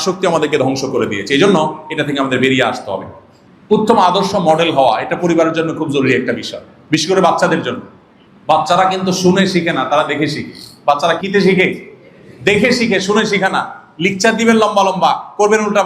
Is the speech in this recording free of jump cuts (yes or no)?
no